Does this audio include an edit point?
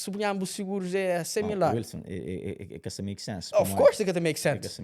no; 0 cuts

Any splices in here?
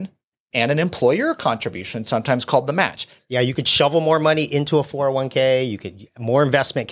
yes; 1 cut; at 3.1 s

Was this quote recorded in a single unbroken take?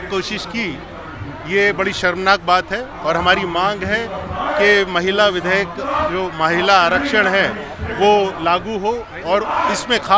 yes; 0 cuts

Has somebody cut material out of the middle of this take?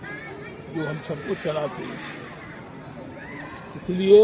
no; 0 cuts

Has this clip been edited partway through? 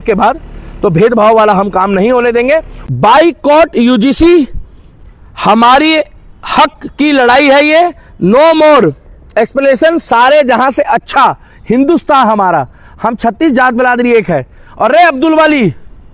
yes; 1 cut; at 2.8 s

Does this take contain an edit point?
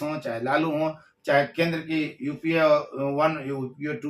no; 0 cuts

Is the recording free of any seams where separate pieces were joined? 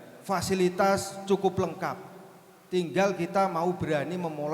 yes; 0 cuts

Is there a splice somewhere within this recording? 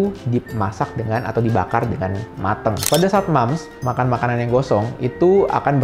yes; 1 cut; at 2.9 s

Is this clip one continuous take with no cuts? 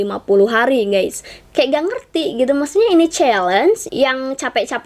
no; 2 cuts; at 1.3 s, 3.9 s

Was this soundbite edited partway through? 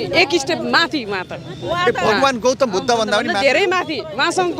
no; 0 cuts

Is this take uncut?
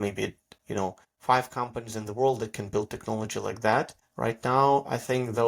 no; 2 cuts; at 1.1 s, 4.0 s

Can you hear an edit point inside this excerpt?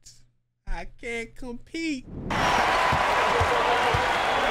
yes; 1 cut; at 2.3 s

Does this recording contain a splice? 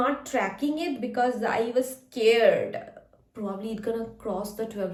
no; 0 cuts

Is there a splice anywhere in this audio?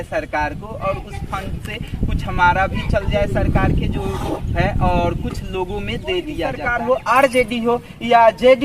yes; 1 cut; at 6.6 s

